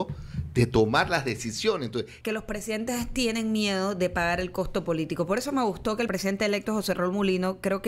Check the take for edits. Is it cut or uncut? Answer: cut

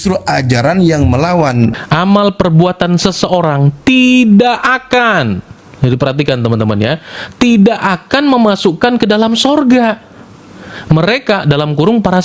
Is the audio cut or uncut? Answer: cut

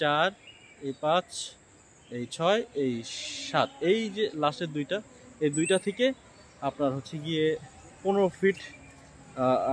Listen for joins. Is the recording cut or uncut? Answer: uncut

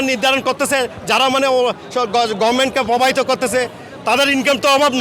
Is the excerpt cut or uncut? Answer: uncut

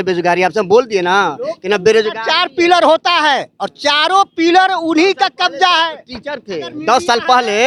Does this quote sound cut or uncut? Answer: uncut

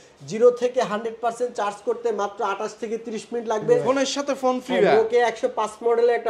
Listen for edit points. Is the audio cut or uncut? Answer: cut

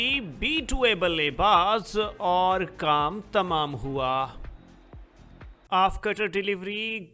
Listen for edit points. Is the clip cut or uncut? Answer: cut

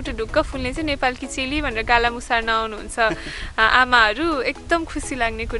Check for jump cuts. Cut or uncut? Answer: uncut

